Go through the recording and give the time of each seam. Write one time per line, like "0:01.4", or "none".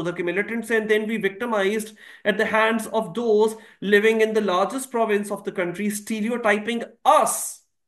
none

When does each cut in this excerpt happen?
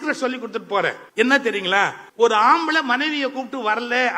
0:01.0
0:02.0

